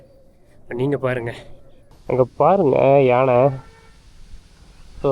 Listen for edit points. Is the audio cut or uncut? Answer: cut